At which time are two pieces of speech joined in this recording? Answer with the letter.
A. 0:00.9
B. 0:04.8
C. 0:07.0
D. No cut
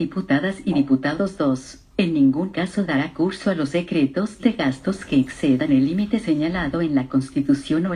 A